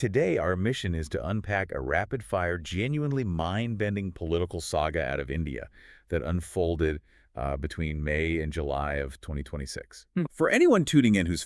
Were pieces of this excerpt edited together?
yes; 1 cut; at 3.9 s

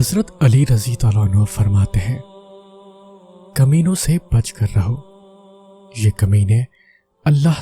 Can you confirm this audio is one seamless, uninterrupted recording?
no; 2 cuts; at 2.2 s, 3.5 s

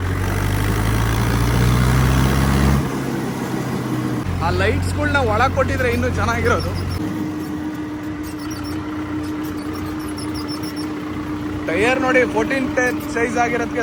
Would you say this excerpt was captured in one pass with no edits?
yes; 0 cuts

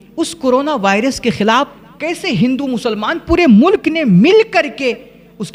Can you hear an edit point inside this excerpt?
no; 0 cuts

